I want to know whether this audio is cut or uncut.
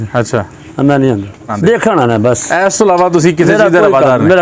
cut